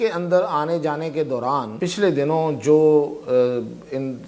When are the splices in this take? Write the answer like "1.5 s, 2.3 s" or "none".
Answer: 1.8 s